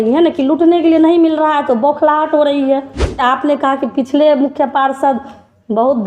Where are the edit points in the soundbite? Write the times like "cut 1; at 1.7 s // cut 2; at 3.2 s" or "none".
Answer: cut 1; at 3.2 s